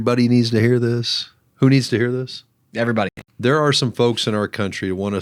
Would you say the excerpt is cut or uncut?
cut